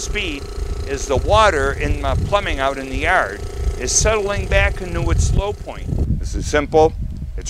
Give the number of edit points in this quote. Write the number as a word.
one